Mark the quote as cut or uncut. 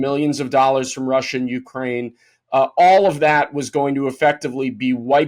uncut